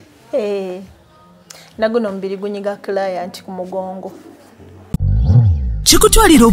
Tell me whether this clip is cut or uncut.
cut